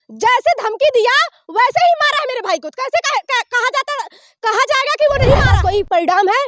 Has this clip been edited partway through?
yes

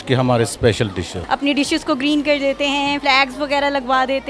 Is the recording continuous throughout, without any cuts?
no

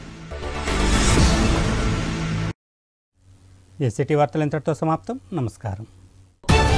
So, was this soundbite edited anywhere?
no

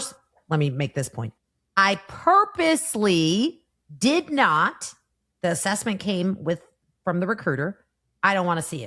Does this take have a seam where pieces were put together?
no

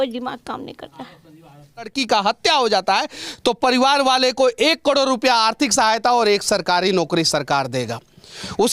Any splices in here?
yes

